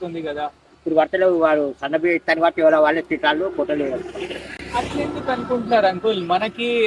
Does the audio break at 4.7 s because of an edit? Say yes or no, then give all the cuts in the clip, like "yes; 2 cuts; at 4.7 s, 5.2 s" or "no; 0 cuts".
no; 0 cuts